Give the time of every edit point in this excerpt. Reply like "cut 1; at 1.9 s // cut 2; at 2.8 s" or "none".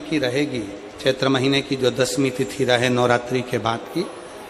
none